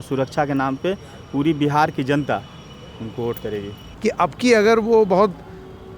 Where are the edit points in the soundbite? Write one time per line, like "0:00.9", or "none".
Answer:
0:03.8